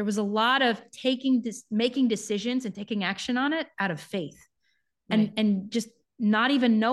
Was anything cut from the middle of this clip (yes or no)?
no